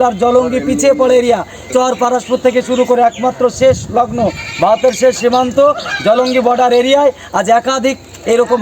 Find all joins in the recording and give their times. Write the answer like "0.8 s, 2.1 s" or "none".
1.6 s